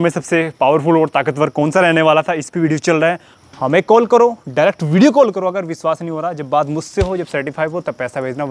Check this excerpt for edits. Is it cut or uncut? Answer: cut